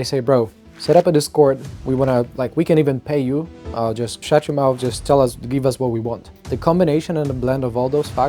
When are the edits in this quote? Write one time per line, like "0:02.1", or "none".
0:04.1
0:06.3